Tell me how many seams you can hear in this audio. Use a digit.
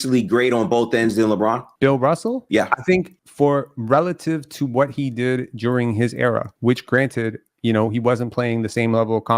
0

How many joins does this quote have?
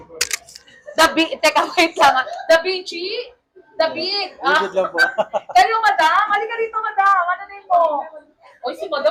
0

